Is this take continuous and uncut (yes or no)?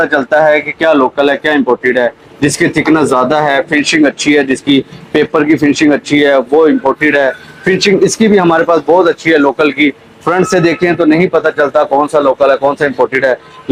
yes